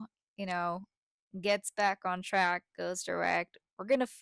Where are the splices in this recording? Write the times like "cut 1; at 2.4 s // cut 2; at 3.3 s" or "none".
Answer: none